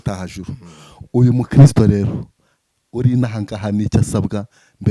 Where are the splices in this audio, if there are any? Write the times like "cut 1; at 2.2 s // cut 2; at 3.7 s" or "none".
none